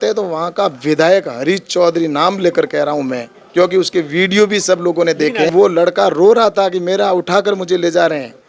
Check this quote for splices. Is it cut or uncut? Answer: cut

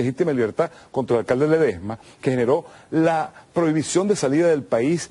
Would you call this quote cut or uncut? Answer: cut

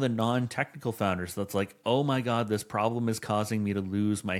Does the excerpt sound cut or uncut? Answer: uncut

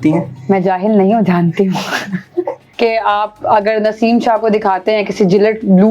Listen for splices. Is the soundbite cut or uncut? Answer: cut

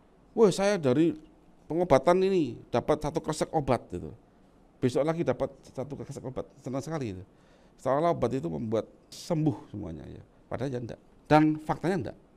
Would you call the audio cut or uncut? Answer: cut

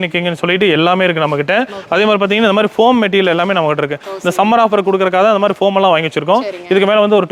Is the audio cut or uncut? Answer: uncut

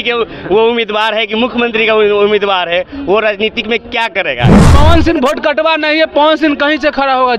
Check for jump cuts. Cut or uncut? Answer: cut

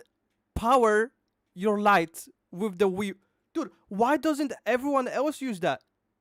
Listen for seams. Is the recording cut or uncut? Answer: uncut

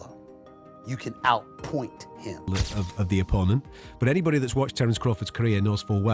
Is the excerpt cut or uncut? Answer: cut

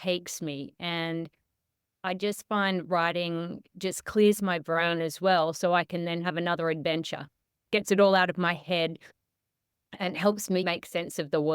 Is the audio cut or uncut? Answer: cut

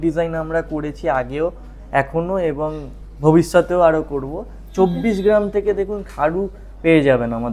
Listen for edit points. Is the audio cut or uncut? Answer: uncut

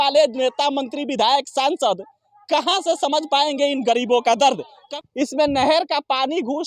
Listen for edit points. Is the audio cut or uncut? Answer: cut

